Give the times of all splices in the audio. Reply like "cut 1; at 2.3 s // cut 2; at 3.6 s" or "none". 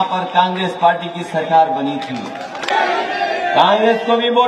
cut 1; at 2.7 s